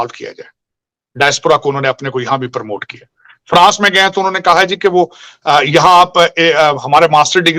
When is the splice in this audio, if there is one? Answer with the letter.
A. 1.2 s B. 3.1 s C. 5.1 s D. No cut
D